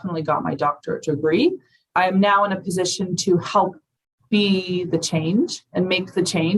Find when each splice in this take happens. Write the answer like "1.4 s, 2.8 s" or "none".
1.9 s